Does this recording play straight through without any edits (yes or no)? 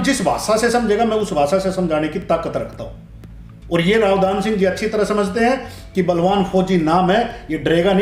yes